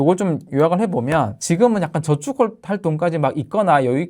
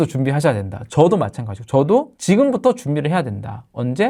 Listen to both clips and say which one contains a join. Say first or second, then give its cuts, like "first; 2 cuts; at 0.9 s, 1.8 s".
first; 1 cut; at 1.4 s